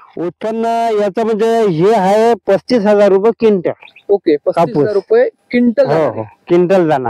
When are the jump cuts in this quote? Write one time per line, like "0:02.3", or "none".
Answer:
none